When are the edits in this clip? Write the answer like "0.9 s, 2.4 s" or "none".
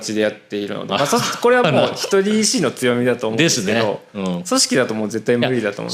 none